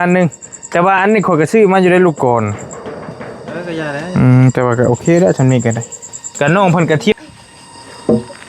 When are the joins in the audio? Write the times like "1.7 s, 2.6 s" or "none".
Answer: 7.1 s